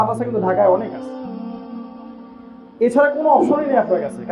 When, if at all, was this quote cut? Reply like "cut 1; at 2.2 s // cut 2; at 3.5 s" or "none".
cut 1; at 0.9 s // cut 2; at 2.7 s